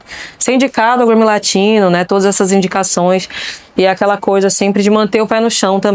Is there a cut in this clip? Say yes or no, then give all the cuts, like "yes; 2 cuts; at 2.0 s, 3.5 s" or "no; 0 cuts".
no; 0 cuts